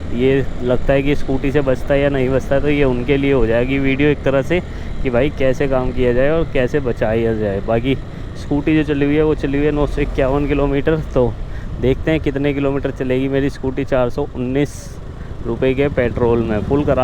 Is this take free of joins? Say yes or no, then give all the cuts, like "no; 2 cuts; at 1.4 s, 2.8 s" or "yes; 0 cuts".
yes; 0 cuts